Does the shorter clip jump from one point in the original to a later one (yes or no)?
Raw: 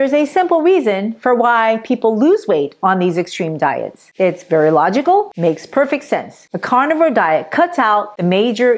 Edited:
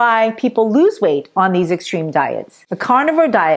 yes